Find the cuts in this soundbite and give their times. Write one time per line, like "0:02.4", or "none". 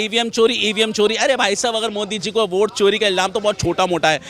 none